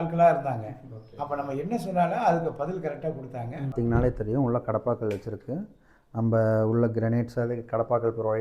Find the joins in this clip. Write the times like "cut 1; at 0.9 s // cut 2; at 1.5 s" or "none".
cut 1; at 3.7 s